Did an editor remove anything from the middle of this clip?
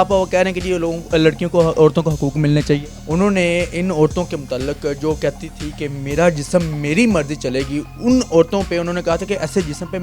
yes; 1 cut; at 2.9 s

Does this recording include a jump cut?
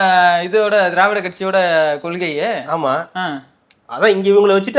no; 0 cuts

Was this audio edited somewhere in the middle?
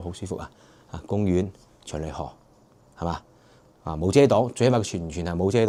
no; 0 cuts

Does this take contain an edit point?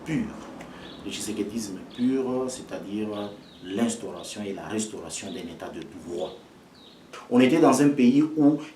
yes; 1 cut; at 7.2 s

